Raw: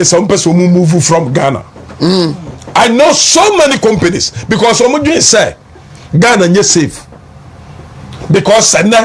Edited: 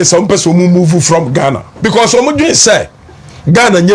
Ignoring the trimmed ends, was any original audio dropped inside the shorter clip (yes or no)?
yes